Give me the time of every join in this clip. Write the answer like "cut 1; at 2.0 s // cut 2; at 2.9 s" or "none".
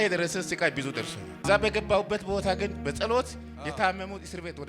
cut 1; at 1.4 s